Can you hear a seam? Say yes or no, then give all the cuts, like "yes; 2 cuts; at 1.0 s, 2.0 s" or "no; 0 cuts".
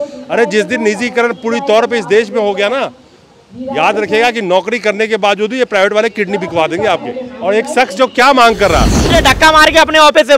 yes; 1 cut; at 9.1 s